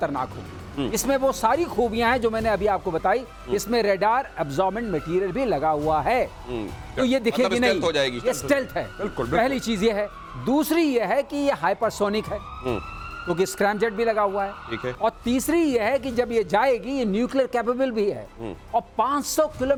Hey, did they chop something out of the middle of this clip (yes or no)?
no